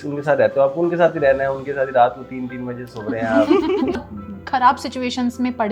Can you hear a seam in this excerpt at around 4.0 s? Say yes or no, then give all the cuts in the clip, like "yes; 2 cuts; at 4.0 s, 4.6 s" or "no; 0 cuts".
yes; 1 cut; at 4.0 s